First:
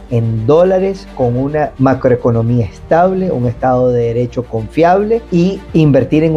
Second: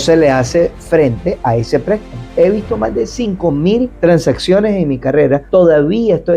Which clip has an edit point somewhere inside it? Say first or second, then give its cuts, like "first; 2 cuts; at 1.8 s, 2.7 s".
second; 1 cut; at 2.2 s